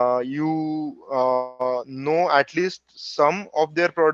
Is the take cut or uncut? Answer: uncut